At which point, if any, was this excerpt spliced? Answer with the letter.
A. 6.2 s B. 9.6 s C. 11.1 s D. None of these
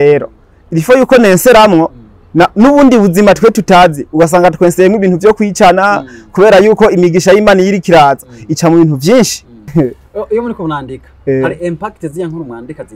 B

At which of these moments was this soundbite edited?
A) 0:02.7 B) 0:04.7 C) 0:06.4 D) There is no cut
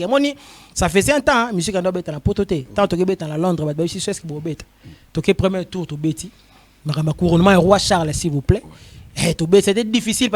D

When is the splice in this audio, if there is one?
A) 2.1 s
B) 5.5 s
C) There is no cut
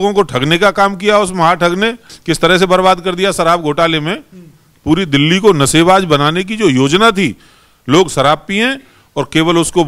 A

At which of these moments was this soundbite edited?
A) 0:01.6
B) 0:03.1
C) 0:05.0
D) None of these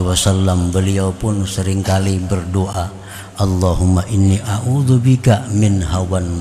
D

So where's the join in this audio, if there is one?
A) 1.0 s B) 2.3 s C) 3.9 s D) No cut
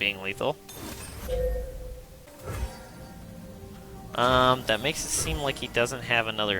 B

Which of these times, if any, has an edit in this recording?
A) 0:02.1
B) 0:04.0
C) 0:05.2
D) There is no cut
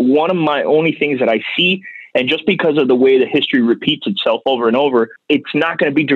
C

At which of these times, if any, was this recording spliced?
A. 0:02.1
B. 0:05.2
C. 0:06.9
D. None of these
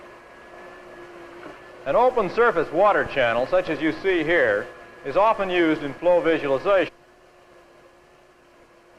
D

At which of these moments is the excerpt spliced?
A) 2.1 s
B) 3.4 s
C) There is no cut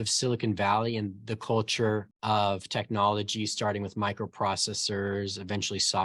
A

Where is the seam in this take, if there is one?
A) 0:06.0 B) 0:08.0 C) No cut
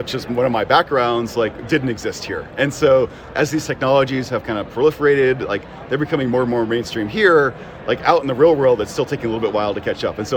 C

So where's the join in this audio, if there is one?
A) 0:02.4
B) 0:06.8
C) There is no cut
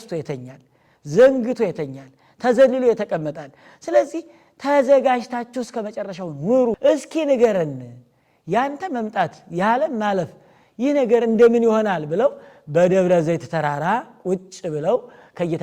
B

